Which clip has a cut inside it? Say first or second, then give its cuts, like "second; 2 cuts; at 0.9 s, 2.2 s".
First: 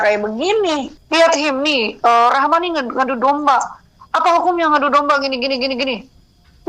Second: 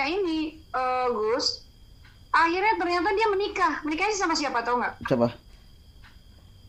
first; 1 cut; at 0.9 s